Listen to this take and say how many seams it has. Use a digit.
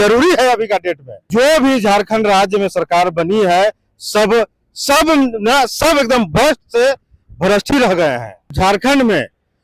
2